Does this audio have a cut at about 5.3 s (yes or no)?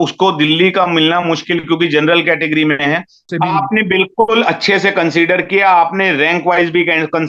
no